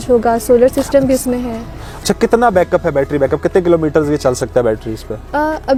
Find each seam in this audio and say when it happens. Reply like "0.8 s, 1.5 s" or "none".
none